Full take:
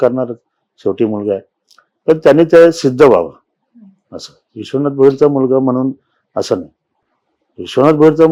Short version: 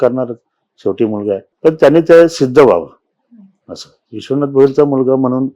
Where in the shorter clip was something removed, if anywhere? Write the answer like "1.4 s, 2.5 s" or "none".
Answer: 1.5 s